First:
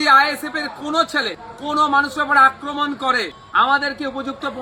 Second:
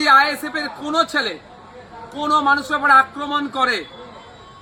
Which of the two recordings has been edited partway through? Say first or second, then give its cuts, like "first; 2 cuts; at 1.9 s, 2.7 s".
first; 2 cuts; at 1.5 s, 3.4 s